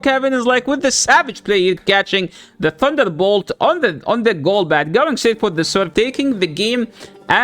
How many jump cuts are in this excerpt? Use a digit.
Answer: 1